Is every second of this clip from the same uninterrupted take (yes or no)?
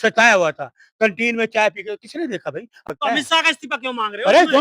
no